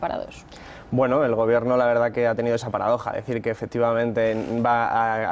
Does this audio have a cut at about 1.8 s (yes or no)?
yes